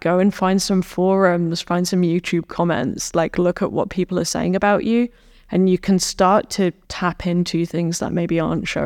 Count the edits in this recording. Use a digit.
0